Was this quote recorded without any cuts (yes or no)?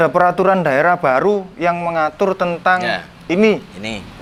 yes